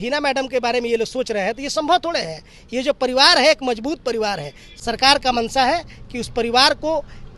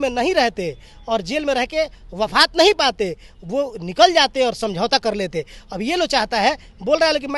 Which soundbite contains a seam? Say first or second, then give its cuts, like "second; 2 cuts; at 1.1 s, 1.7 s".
first; 1 cut; at 4.7 s